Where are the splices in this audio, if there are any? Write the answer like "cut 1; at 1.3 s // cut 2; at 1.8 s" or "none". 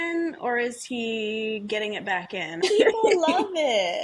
cut 1; at 2.6 s